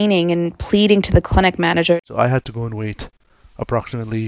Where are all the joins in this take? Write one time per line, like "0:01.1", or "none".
0:02.0